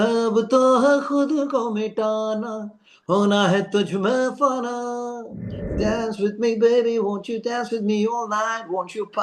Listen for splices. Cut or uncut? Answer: cut